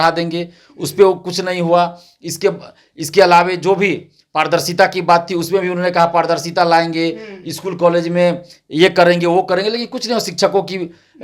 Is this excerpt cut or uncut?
uncut